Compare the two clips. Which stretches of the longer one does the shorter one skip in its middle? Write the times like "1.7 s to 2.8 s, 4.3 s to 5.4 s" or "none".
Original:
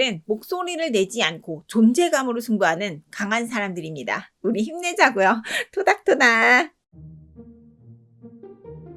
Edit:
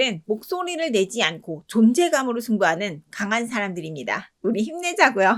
none